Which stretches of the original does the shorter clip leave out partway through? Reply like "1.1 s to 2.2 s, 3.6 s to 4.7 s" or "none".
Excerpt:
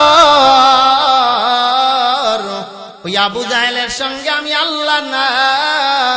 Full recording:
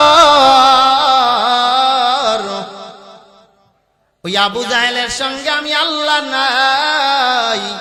2.8 s to 4.1 s